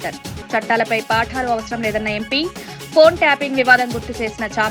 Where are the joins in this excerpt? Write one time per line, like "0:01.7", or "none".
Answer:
none